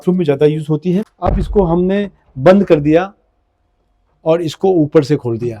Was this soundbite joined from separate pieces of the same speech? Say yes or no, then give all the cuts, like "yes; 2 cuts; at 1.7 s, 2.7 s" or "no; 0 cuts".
yes; 1 cut; at 1.2 s